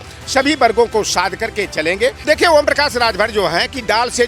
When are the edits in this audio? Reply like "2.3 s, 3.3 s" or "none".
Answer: 2.2 s